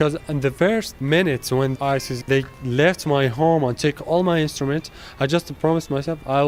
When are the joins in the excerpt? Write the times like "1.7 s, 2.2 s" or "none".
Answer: none